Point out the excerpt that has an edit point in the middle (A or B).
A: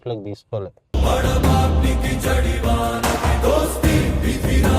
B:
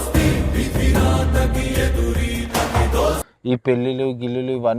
B